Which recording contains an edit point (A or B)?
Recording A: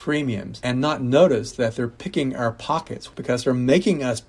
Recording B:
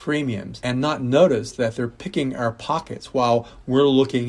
A